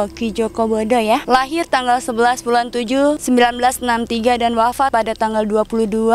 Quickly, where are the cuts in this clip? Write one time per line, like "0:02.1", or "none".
0:01.2
0:03.2
0:04.9